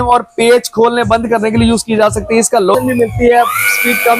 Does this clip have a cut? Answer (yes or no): yes